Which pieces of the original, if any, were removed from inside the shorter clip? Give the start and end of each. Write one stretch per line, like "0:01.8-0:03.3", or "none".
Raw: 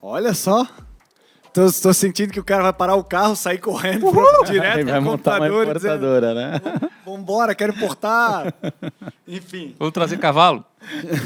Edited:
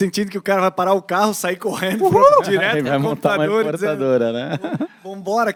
none